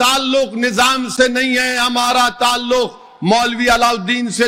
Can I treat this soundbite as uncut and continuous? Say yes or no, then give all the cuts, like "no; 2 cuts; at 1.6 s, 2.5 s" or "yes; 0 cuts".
yes; 0 cuts